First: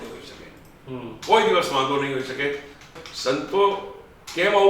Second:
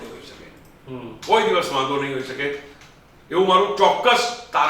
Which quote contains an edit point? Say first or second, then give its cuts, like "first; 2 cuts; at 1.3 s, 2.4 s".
first; 1 cut; at 3.0 s